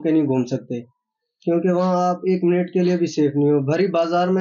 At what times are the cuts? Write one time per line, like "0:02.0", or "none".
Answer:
none